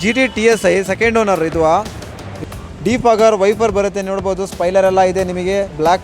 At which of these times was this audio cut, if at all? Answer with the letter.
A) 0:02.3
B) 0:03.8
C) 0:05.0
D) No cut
A